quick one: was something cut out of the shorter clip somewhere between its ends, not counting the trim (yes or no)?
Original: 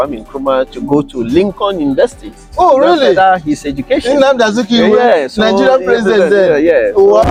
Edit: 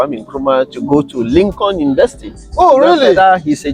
no